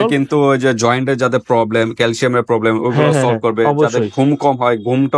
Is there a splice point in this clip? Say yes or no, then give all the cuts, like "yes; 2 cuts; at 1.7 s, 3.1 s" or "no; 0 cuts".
no; 0 cuts